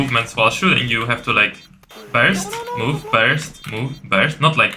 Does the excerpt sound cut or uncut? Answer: uncut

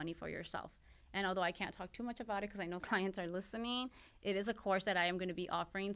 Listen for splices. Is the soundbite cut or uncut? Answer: uncut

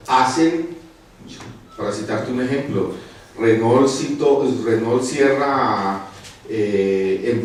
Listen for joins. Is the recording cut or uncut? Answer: uncut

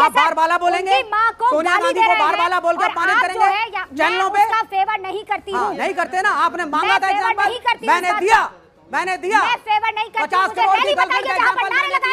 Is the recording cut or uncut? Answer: uncut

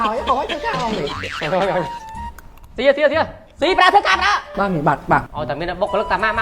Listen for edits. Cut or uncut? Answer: cut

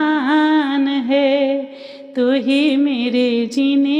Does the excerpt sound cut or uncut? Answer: uncut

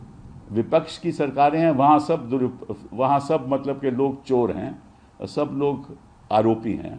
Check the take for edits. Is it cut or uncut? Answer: uncut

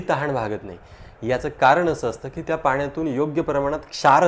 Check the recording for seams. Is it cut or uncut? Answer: uncut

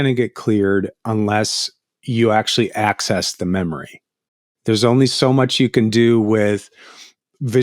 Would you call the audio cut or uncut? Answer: cut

